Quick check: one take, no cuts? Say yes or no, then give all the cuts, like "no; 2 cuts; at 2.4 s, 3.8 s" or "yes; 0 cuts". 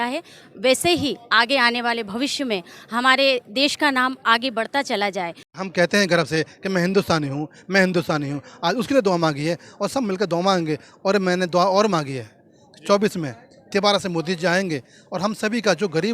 no; 1 cut; at 5.5 s